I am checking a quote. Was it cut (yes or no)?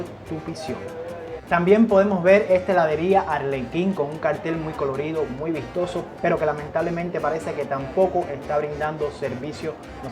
no